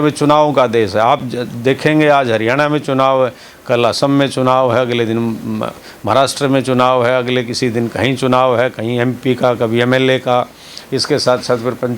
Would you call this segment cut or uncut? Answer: uncut